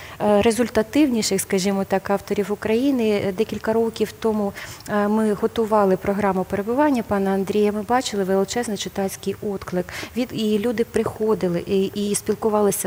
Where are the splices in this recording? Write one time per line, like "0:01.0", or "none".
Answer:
none